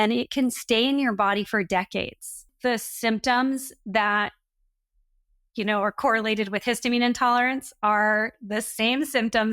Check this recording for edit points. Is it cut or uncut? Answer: cut